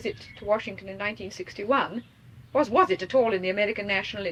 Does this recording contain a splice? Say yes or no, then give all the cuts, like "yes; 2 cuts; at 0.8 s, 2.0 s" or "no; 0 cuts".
no; 0 cuts